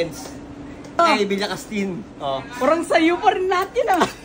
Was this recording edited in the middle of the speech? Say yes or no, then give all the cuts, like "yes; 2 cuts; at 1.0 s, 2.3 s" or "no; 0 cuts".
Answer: yes; 1 cut; at 1.0 s